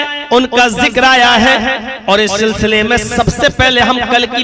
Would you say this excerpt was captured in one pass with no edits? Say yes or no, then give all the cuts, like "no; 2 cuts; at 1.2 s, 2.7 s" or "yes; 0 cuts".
yes; 0 cuts